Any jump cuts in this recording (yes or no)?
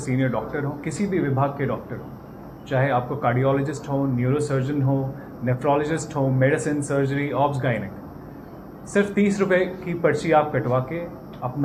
no